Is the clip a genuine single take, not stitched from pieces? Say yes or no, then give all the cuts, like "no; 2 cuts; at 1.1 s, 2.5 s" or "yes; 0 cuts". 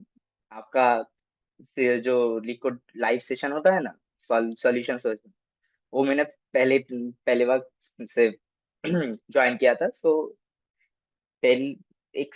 yes; 0 cuts